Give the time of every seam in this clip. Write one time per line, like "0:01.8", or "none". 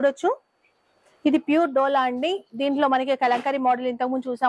none